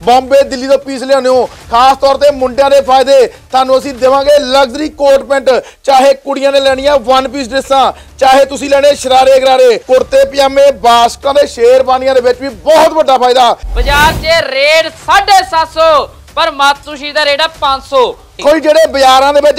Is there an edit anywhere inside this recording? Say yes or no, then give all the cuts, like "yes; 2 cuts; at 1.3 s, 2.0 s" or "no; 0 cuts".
yes; 3 cuts; at 9.8 s, 13.7 s, 18.4 s